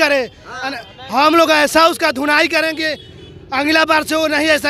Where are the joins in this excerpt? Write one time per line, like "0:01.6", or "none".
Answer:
none